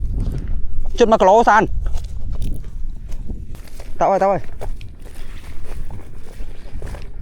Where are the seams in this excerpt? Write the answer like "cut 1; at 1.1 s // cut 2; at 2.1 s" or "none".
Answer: cut 1; at 3.6 s